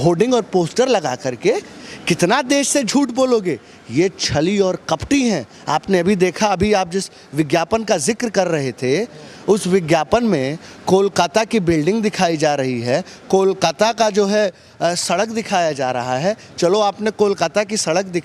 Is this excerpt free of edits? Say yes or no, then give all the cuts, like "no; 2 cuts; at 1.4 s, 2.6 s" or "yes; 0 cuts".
yes; 0 cuts